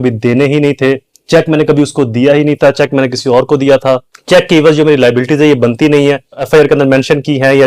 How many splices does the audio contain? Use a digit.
2